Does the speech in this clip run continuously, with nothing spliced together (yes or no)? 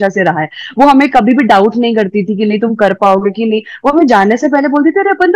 yes